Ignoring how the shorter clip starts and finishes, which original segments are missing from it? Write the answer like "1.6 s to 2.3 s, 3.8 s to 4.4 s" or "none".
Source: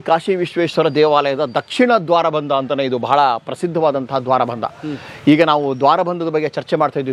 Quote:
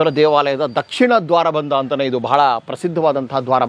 none

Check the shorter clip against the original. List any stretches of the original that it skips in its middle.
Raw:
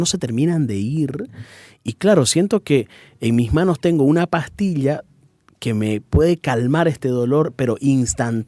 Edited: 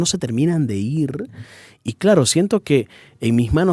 none

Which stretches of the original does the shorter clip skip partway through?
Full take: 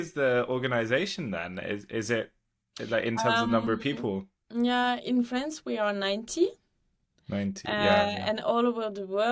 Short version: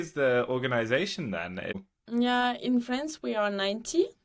1.8 s to 4.2 s

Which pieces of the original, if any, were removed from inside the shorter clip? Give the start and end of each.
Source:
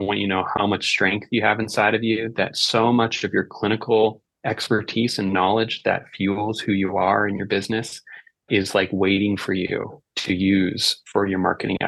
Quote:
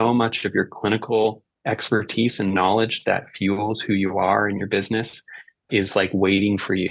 none

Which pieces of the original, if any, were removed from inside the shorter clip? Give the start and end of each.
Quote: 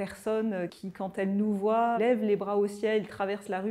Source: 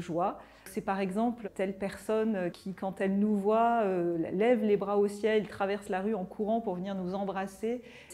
3.8 s to 4.4 s

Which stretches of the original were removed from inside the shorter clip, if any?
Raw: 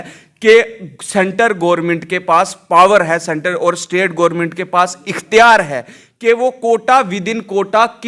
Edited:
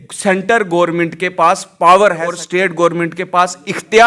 3.2 s to 3.7 s

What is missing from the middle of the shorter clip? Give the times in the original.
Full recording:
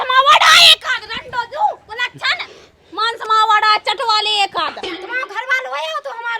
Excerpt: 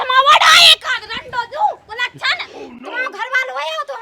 2.8 s to 5.0 s

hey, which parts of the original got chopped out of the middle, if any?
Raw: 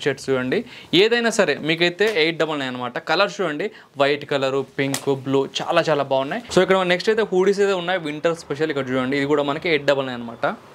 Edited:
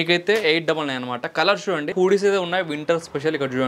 3.6 s to 7.3 s

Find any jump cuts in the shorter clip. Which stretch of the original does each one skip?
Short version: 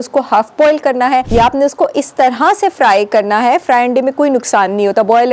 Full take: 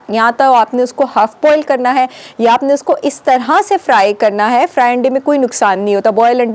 2.1 s to 2.4 s

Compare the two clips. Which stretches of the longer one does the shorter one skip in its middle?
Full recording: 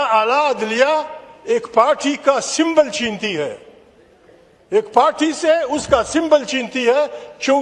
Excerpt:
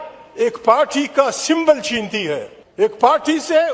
3.7 s to 4.5 s

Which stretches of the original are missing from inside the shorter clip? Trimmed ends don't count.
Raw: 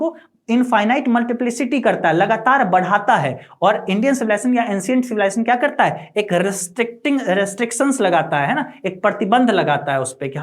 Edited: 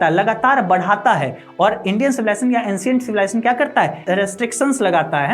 6.1 s to 7.2 s

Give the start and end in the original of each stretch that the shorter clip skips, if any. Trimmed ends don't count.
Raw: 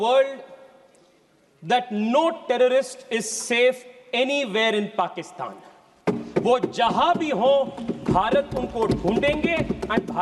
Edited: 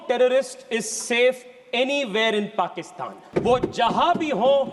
5.6 s to 6.2 s

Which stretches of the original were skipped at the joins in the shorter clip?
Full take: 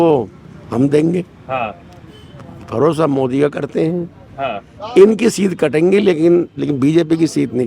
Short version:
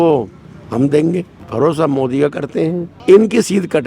1.4 s to 2.6 s, 4.1 s to 4.8 s

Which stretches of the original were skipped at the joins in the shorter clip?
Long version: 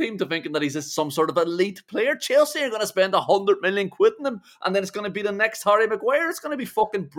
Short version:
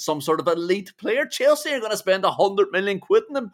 none

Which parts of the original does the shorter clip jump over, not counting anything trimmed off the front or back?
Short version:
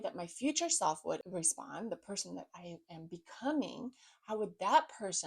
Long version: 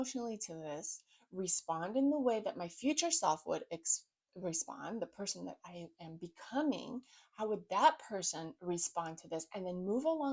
3.6 s to 4.3 s

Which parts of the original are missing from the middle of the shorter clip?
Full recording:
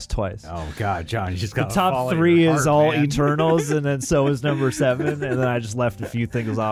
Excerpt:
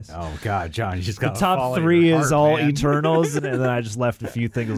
3.7 s to 5.1 s

